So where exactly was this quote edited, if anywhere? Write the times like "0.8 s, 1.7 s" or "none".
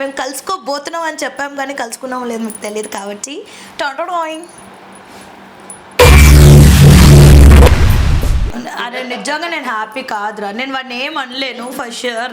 8.4 s